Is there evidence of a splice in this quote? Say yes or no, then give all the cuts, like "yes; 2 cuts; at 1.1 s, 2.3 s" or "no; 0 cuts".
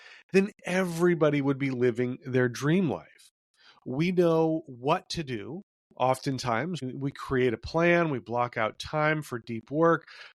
no; 0 cuts